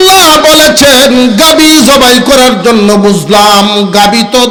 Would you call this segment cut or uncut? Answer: uncut